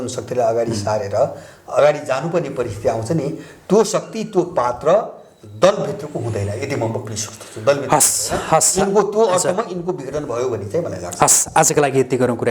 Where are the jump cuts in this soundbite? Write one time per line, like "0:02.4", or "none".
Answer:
none